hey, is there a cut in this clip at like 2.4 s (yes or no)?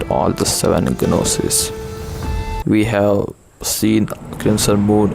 yes